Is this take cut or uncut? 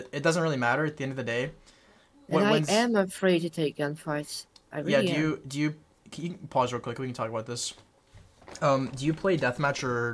uncut